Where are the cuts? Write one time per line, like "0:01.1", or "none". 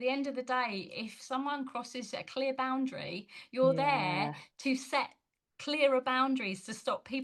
none